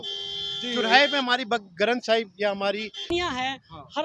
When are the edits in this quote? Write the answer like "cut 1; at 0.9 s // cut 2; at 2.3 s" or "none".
cut 1; at 3.1 s